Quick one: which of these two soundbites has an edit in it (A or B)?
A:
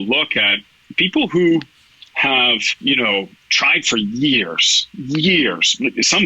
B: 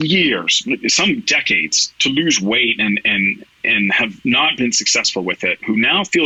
A